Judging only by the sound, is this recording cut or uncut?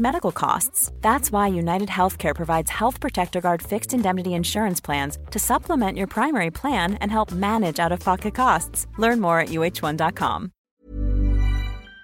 cut